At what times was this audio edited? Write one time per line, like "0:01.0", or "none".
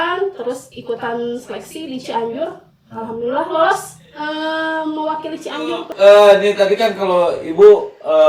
0:05.9

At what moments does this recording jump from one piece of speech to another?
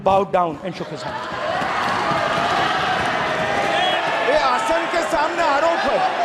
0:04.0

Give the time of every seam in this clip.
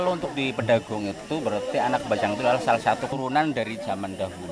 0:03.2

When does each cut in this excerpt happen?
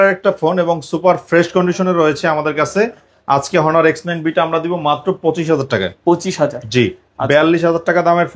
none

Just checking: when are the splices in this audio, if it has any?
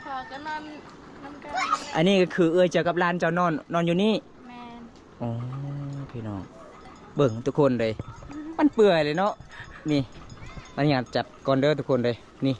none

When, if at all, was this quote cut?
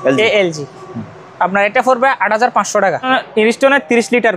0:03.1

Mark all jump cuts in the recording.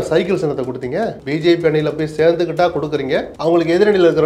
0:01.2
0:03.3

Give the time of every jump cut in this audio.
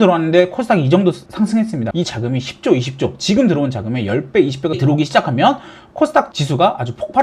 0:01.9
0:04.8

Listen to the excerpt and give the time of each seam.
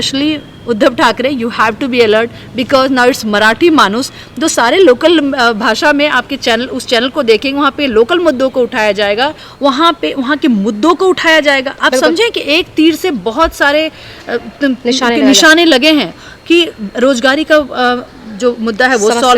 0:09.3

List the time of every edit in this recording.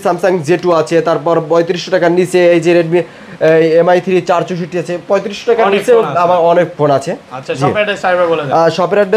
none

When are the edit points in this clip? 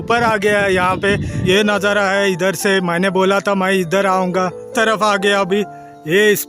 0:01.3
0:04.7

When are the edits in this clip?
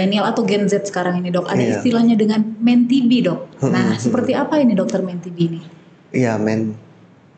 none

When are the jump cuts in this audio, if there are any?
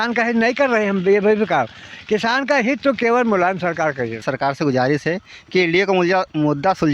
0:04.2

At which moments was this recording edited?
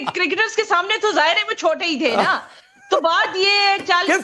0:01.5

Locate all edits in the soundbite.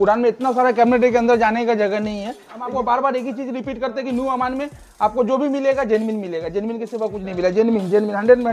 0:02.7

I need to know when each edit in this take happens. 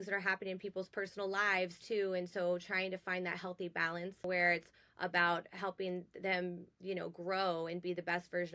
0:04.2

